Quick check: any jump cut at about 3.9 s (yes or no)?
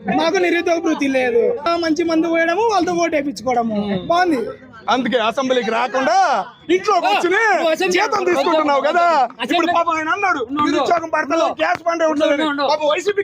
no